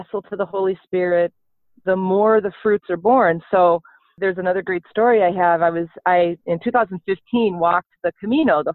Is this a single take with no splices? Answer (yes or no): no